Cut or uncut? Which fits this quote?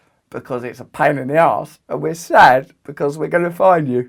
uncut